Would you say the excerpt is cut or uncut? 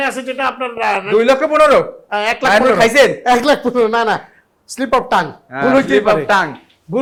uncut